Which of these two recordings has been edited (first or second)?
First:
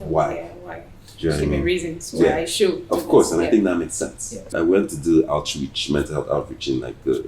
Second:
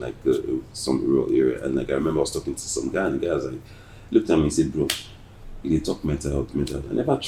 first